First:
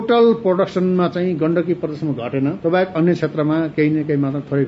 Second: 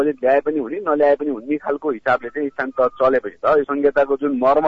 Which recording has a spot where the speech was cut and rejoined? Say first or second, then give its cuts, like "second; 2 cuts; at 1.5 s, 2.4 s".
first; 1 cut; at 2.6 s